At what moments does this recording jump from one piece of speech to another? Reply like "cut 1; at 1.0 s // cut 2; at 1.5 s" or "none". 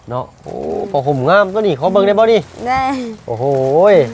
none

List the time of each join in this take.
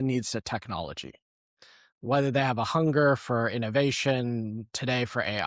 cut 1; at 1.9 s

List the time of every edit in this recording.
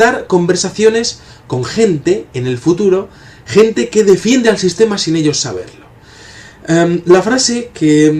cut 1; at 1.7 s

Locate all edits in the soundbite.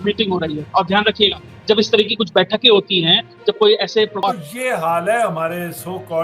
cut 1; at 4.2 s

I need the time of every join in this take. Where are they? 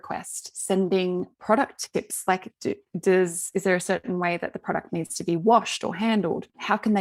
none

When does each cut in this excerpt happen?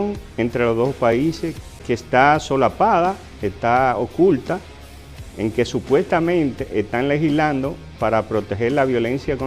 cut 1; at 1.8 s

